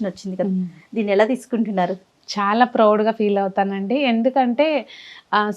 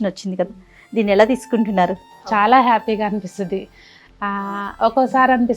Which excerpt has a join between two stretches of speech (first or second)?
second